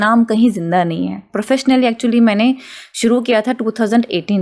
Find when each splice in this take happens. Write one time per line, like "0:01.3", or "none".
0:01.3